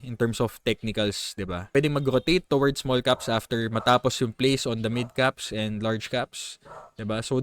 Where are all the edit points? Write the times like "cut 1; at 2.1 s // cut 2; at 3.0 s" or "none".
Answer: cut 1; at 1.8 s